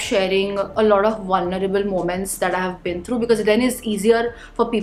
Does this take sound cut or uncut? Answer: uncut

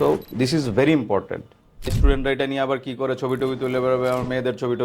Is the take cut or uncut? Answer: cut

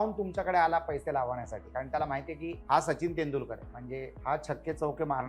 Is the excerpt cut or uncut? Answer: cut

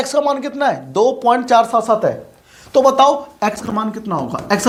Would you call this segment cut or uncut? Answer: uncut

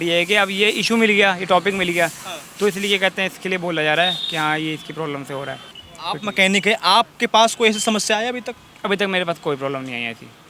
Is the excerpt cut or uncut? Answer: uncut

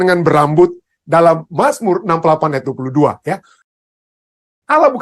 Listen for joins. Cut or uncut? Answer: cut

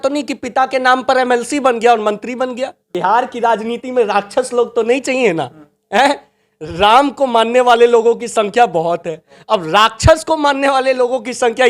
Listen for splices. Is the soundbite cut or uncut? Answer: cut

